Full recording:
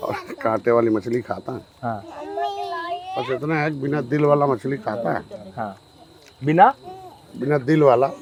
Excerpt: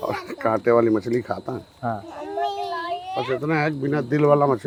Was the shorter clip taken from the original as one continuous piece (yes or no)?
yes